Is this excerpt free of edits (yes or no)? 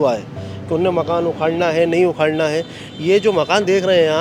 yes